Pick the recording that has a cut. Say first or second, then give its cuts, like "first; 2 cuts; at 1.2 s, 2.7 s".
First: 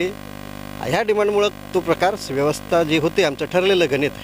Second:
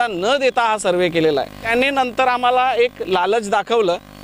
second; 1 cut; at 1.6 s